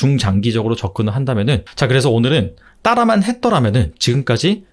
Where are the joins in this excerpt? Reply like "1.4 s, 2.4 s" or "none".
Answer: 1.7 s